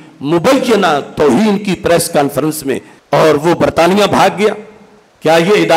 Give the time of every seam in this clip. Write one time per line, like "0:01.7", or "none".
0:02.9